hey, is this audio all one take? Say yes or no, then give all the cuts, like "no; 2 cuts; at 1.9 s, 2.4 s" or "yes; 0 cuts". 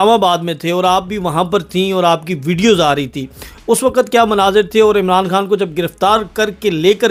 yes; 0 cuts